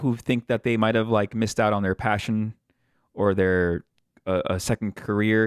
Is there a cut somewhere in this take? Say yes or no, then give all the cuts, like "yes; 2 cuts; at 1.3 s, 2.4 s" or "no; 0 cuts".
no; 0 cuts